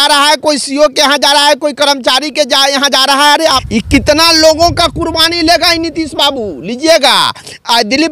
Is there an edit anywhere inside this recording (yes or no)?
yes